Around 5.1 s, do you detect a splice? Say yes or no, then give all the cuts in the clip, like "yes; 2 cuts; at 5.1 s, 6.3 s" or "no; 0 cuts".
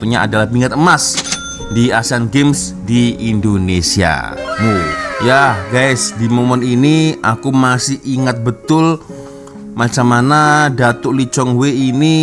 yes; 1 cut; at 5.1 s